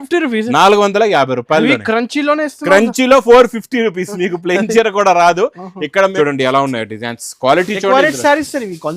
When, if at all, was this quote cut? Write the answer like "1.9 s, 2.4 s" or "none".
6.1 s